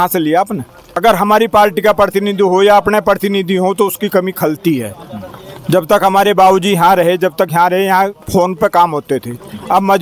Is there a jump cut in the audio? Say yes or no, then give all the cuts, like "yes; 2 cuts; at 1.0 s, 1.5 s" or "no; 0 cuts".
yes; 1 cut; at 1.0 s